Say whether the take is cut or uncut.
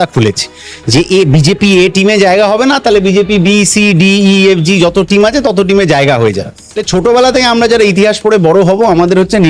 cut